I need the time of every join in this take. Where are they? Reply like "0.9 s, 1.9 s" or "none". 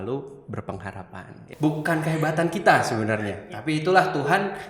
1.4 s